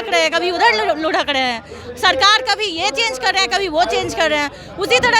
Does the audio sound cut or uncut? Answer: uncut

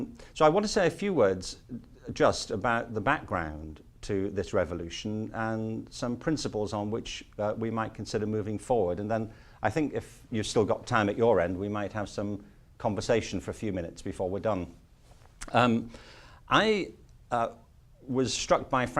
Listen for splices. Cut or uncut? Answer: cut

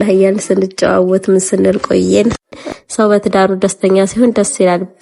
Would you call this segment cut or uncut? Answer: cut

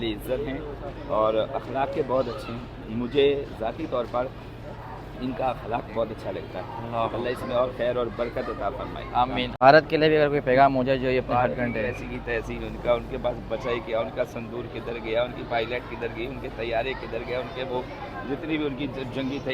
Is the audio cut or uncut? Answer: cut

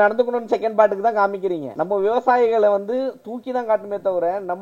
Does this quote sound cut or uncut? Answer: cut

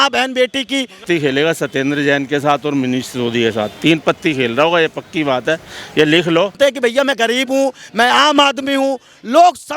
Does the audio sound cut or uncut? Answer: cut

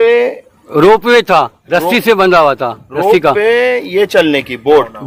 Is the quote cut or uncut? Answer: uncut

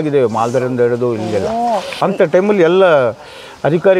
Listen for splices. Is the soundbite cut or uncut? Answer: cut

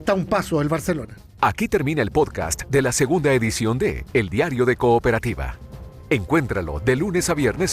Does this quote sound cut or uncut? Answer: uncut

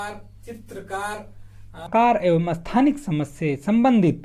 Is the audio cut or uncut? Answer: cut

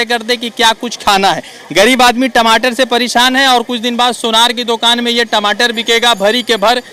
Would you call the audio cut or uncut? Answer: uncut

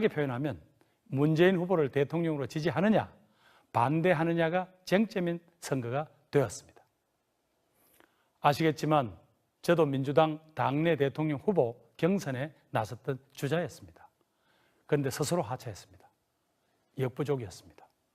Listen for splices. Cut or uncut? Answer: cut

